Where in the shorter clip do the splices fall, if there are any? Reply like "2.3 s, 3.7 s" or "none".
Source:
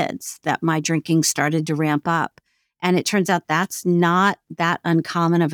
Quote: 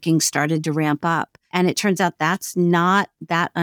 1.4 s